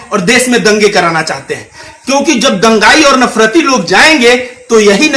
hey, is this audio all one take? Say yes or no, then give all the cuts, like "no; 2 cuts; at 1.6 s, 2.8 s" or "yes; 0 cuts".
no; 1 cut; at 1.9 s